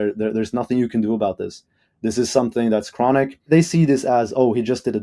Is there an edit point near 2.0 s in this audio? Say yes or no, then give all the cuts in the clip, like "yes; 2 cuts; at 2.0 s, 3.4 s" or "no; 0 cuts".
no; 1 cut; at 3.5 s